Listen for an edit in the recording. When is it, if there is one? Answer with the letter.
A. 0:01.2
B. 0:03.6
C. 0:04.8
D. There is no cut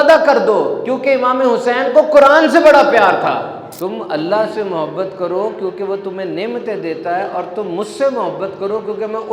B